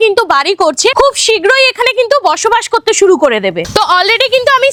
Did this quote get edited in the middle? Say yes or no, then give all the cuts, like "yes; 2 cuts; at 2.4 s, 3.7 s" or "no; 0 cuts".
no; 0 cuts